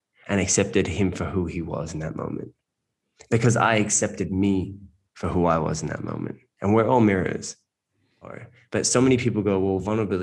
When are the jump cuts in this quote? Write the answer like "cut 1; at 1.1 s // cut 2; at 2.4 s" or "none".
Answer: cut 1; at 8.5 s